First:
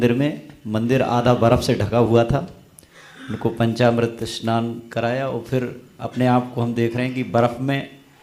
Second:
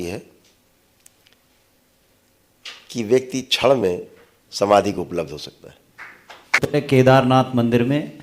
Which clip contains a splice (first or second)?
second